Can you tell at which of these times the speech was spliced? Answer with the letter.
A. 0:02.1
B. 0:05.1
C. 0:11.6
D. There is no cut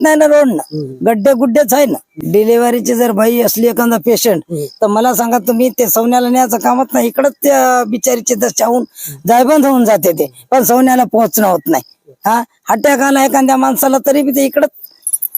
A